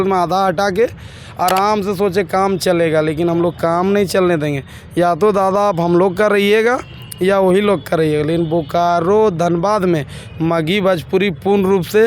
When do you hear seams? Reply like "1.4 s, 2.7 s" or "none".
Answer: none